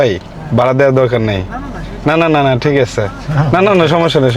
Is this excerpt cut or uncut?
uncut